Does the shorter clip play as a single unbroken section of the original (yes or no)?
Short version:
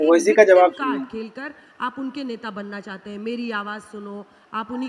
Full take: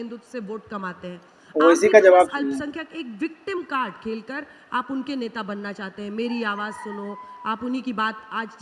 no